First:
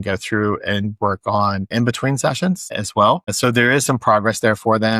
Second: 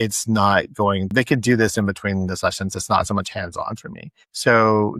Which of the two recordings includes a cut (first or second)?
first